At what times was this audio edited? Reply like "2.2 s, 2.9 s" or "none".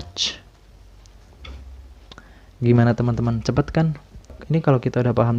4.4 s